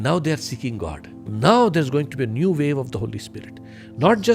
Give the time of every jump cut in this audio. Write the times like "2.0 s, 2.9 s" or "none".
1.3 s